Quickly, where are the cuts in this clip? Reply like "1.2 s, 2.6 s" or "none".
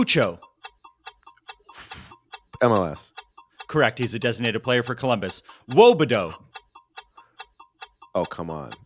6.4 s, 8.1 s